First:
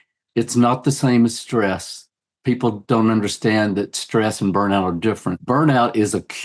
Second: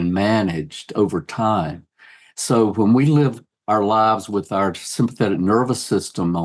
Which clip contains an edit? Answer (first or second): first